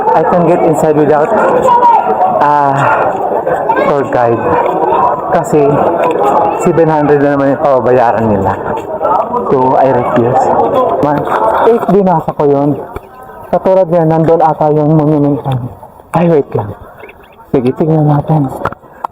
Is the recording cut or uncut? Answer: cut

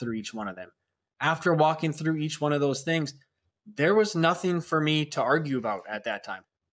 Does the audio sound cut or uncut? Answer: uncut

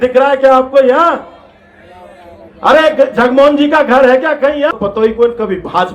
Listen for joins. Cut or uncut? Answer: cut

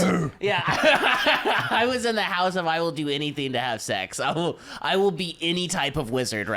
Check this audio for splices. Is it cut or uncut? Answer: uncut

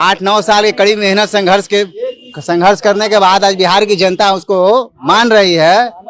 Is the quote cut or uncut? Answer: uncut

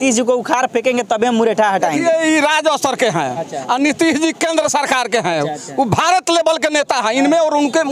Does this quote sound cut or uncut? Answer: uncut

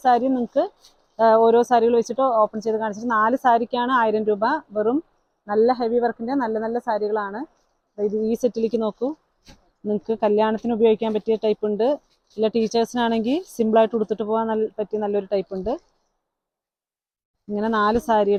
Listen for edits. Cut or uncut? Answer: uncut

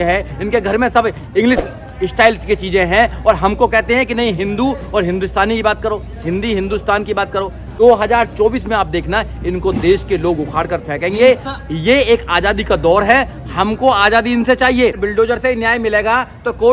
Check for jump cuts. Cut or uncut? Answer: cut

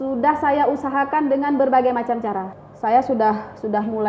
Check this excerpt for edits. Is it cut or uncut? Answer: cut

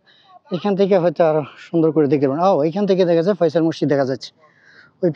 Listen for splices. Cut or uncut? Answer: uncut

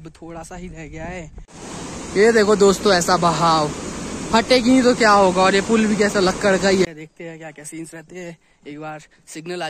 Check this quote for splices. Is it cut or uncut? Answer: cut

